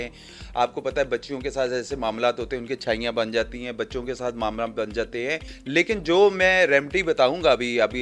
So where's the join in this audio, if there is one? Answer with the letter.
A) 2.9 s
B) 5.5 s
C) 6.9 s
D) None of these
B